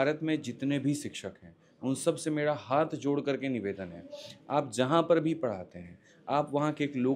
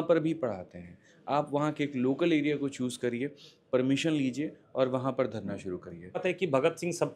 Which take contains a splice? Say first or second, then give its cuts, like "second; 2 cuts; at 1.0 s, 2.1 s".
second; 1 cut; at 6.2 s